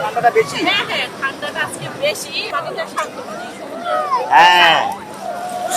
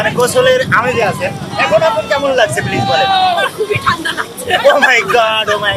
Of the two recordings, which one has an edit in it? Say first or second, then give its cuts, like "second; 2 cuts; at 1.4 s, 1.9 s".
first; 1 cut; at 2.5 s